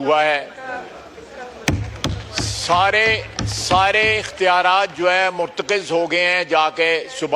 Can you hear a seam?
no; 0 cuts

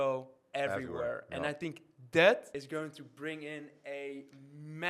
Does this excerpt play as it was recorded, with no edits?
no; 1 cut; at 2.5 s

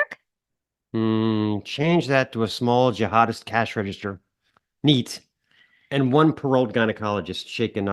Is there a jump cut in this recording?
no; 0 cuts

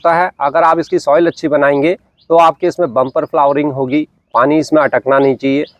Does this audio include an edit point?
no; 0 cuts

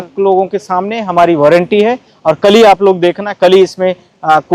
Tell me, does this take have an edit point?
no; 0 cuts

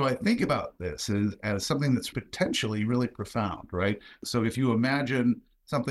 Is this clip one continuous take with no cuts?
no; 2 cuts; at 2.1 s, 4.2 s

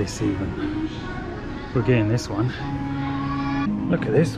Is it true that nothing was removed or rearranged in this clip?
yes; 0 cuts

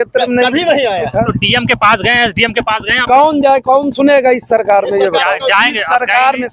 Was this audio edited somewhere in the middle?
no; 0 cuts

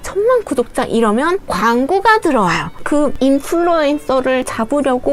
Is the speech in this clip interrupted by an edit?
no; 0 cuts

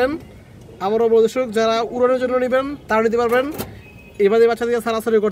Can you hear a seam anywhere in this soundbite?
no; 0 cuts

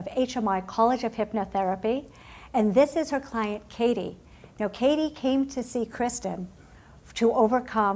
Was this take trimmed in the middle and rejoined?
yes; 1 cut; at 3.5 s

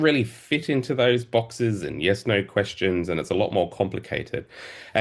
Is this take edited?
no; 0 cuts

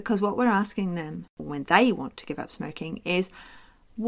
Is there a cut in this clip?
yes; 1 cut; at 1.3 s

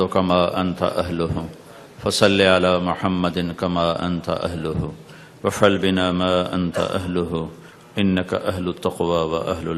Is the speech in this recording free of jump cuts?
yes; 0 cuts

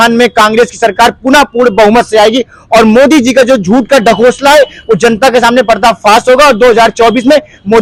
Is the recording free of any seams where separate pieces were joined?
yes; 0 cuts

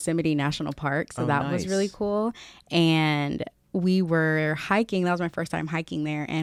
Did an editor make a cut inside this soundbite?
no; 0 cuts

